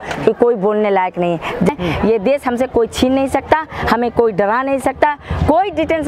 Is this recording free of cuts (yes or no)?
no